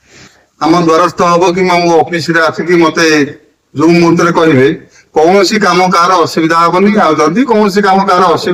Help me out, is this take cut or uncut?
uncut